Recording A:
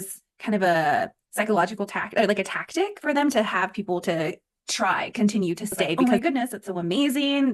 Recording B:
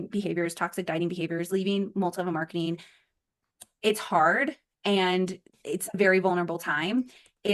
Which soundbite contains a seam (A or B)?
A